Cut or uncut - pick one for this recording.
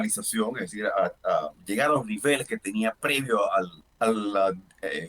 cut